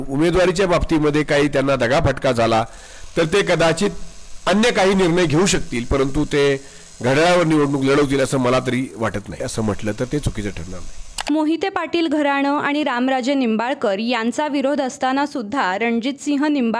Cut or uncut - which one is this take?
uncut